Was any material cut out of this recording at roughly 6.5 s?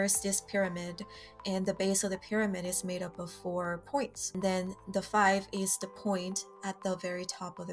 no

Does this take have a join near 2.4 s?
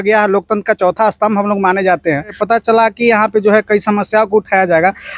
yes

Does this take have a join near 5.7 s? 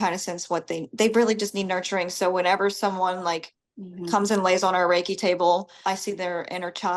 yes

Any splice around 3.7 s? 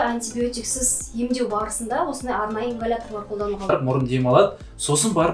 yes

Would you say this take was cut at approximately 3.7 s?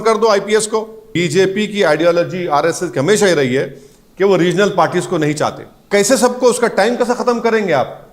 no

